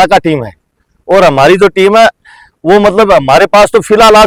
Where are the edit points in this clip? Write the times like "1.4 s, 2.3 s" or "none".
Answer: none

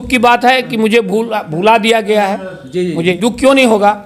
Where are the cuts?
3.1 s

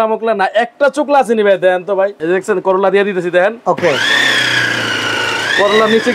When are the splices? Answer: 2.1 s

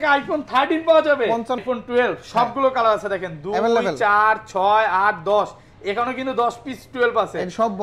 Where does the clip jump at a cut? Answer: 1.6 s

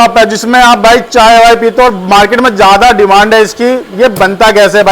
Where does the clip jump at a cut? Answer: none

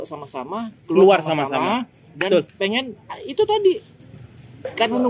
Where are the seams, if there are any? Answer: none

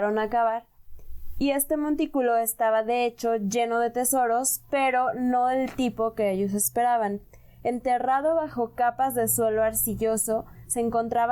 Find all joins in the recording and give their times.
none

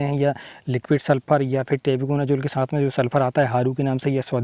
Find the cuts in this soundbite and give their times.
none

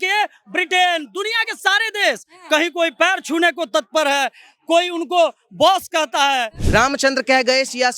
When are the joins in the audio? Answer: 6.6 s

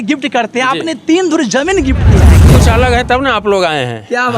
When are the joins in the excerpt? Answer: 2.3 s

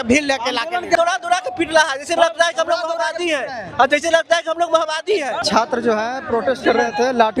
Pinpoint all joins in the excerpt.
1.0 s, 5.4 s

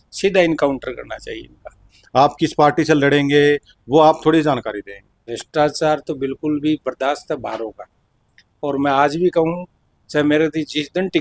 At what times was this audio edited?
1.9 s, 5.3 s

